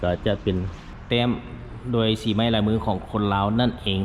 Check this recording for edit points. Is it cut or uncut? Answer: cut